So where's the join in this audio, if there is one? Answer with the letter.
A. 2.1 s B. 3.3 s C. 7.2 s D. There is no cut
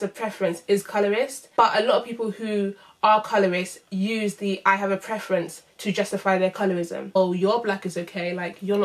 C